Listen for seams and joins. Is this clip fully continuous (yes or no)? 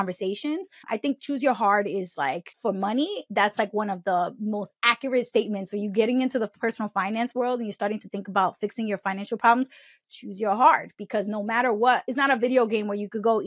yes